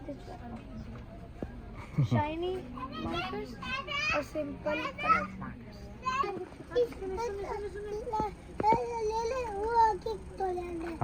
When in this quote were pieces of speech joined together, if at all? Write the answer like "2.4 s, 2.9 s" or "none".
6.3 s